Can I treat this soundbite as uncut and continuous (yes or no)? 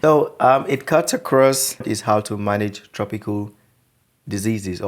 no